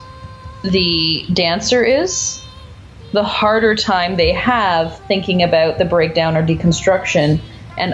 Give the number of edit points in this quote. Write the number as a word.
zero